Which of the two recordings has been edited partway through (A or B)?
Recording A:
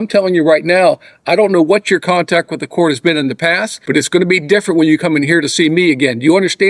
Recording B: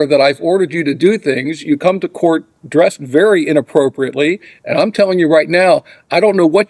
A